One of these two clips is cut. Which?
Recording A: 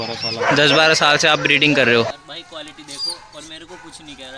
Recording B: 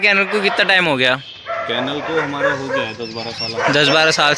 A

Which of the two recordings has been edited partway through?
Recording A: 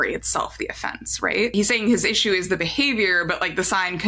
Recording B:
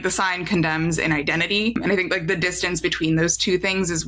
A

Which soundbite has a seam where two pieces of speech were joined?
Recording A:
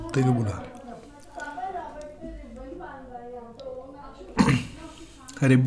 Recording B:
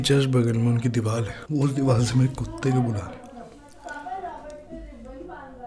B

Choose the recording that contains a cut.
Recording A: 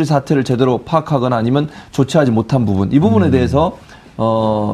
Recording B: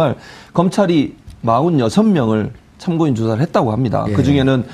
A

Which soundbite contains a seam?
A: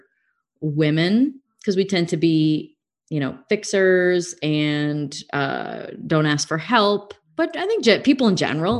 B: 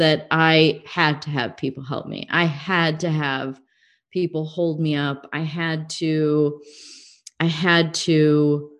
A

